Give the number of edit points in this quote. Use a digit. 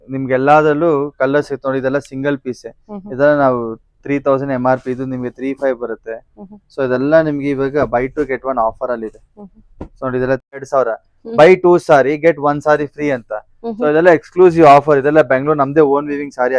1